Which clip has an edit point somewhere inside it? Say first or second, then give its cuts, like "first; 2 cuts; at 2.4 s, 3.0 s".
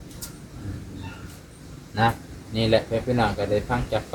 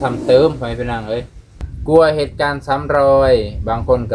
second; 1 cut; at 1.7 s